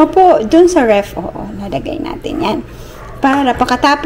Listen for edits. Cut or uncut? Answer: uncut